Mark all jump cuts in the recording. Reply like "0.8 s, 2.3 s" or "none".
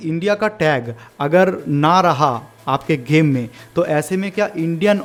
none